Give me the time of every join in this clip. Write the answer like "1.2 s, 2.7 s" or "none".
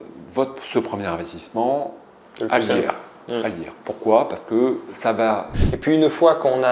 5.6 s

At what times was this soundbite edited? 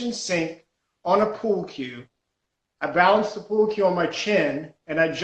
none

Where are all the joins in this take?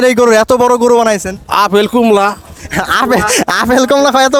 none

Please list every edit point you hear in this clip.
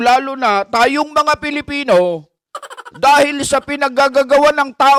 none

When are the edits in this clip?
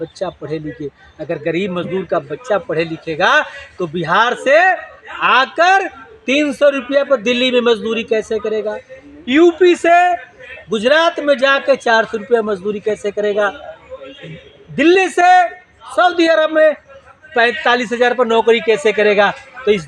none

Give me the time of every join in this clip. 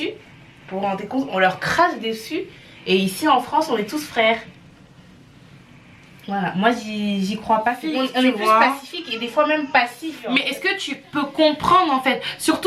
7.8 s, 10.1 s

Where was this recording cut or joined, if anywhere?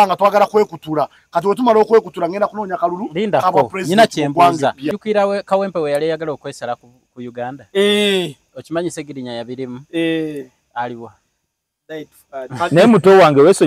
4.9 s

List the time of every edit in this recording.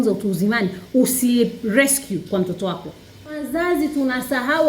3.5 s

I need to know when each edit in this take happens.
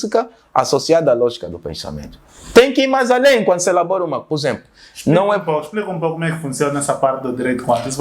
none

